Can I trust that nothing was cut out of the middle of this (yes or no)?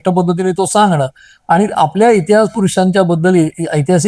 yes